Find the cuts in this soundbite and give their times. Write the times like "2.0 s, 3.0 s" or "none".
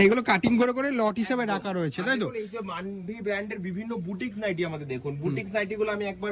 none